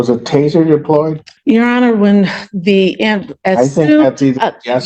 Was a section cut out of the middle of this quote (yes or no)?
yes